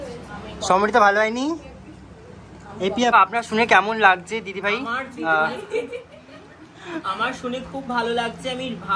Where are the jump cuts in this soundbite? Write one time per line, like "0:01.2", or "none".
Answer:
0:03.1

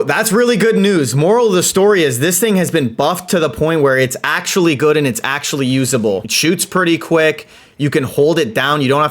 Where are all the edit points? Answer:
0:06.2

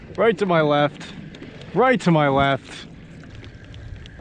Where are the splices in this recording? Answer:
0:03.3

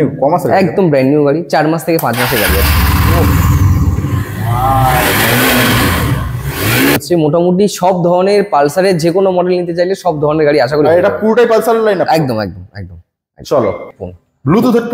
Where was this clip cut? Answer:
0:07.0
0:14.0

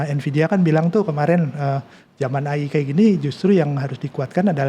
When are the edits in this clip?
none

